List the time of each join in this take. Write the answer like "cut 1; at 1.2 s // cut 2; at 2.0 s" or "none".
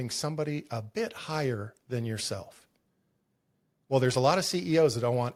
none